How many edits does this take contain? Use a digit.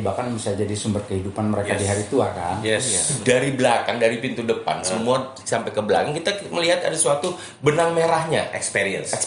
1